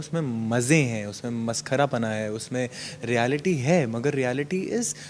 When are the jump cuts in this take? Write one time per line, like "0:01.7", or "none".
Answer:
none